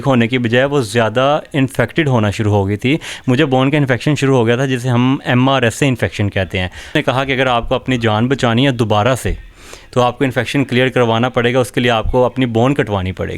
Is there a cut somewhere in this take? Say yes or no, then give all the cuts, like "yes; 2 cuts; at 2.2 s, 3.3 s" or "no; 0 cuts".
yes; 1 cut; at 7.0 s